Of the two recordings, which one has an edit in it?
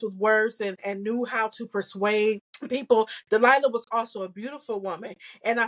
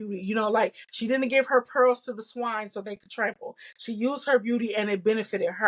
first; 2 cuts; at 0.8 s, 2.5 s

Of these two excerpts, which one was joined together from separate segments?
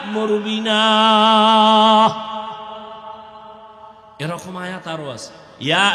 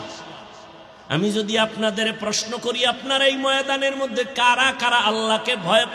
first; 1 cut; at 3.9 s

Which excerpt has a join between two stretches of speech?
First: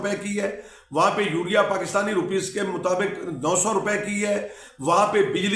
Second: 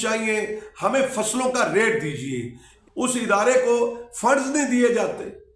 second; 1 cut; at 2.6 s

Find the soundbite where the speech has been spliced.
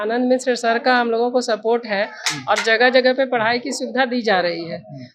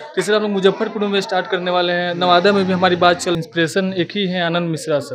second; 1 cut; at 3.4 s

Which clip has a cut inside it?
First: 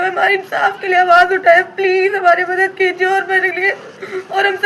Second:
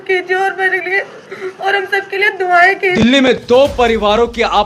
second; 1 cut; at 3.2 s

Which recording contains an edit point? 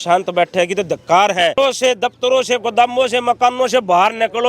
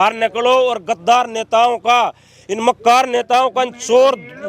first; 1 cut; at 1.6 s

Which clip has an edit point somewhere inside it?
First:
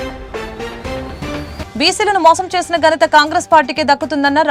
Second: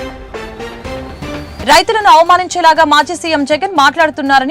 second; 1 cut; at 1.6 s

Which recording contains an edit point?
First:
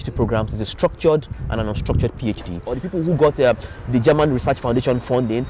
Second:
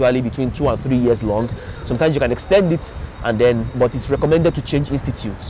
first; 1 cut; at 2.7 s

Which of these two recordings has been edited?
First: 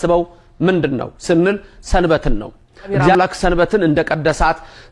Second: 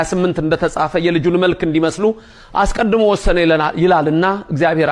first; 1 cut; at 3.1 s

